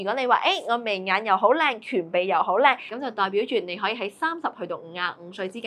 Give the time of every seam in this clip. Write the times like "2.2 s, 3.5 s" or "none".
2.9 s